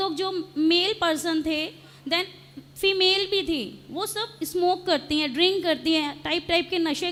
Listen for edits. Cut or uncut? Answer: uncut